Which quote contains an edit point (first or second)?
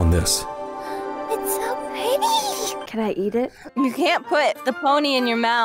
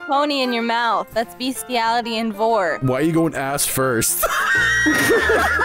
first